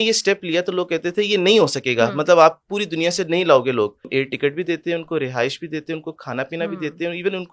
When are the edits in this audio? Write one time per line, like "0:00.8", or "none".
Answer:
0:04.1